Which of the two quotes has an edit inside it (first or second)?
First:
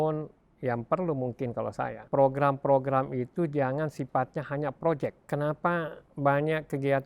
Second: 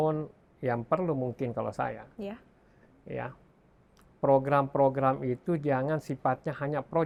first